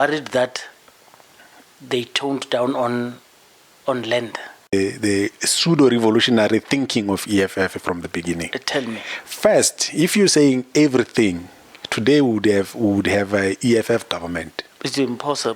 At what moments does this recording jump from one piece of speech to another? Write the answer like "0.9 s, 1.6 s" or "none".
4.7 s